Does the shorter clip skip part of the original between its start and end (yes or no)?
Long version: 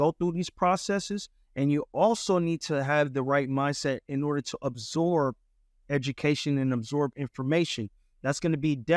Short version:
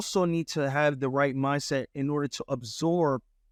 no